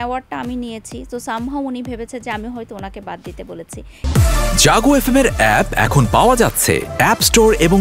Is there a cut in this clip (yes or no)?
yes